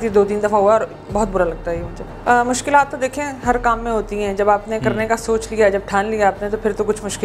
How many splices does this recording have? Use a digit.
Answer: 1